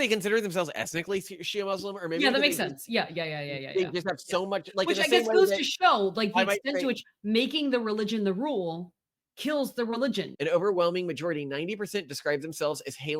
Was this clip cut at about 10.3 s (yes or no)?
yes